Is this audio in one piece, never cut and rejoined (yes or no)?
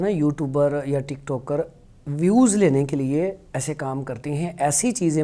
yes